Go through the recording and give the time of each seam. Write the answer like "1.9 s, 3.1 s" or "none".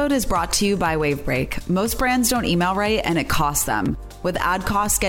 none